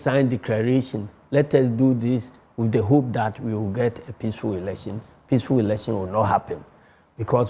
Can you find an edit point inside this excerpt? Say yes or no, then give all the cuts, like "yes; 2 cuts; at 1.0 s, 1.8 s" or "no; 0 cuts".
no; 0 cuts